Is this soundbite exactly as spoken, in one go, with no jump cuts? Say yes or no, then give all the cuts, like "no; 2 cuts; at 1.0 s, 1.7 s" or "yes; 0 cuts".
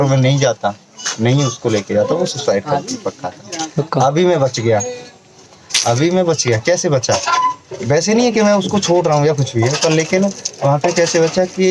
yes; 0 cuts